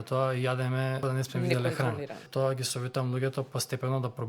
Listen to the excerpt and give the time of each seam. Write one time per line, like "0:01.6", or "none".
0:01.0
0:02.2